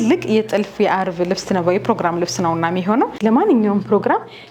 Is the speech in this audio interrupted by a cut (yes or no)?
yes